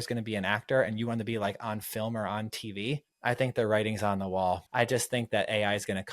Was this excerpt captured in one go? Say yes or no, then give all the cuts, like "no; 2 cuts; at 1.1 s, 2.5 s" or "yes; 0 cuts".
no; 2 cuts; at 3.1 s, 4.7 s